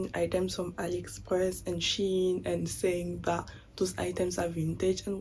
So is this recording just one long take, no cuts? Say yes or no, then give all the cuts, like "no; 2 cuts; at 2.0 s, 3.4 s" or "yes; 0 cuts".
yes; 0 cuts